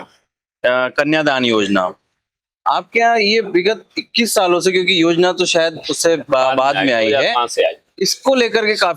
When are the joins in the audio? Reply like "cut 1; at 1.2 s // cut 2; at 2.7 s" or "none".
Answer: none